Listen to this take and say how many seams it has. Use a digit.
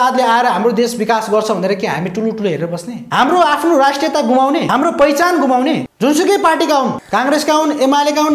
4